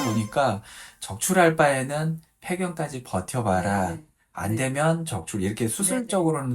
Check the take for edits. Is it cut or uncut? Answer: uncut